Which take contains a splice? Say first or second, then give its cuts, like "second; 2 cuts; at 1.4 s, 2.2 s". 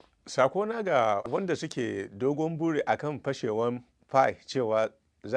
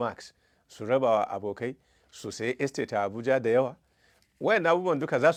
first; 1 cut; at 1.2 s